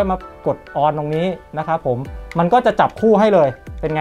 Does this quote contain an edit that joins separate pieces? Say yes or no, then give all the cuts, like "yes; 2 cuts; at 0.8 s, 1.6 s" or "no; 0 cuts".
no; 0 cuts